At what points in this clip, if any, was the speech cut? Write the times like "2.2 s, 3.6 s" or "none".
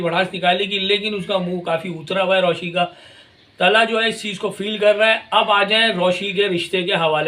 none